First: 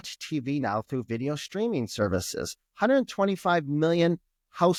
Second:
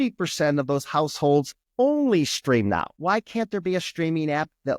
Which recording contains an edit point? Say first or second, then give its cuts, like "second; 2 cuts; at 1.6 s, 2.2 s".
second; 2 cuts; at 1.6 s, 2.9 s